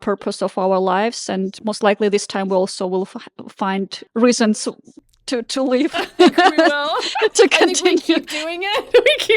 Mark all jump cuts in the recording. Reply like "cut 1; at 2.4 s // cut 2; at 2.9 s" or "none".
cut 1; at 1.6 s // cut 2; at 4.0 s